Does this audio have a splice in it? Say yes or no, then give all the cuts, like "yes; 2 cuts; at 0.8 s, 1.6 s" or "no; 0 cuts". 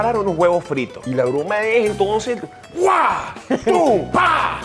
yes; 1 cut; at 1.0 s